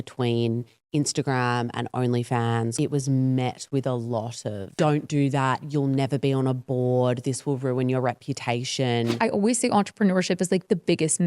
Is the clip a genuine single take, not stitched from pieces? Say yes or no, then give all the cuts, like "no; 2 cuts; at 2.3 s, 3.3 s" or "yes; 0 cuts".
no; 3 cuts; at 2.7 s, 4.8 s, 9.2 s